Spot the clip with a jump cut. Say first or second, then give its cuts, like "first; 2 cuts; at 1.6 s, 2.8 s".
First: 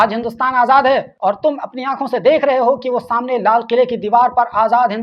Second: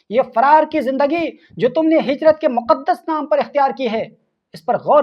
first; 1 cut; at 1.1 s